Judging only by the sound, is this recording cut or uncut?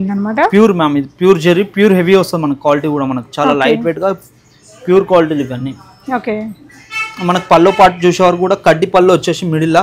uncut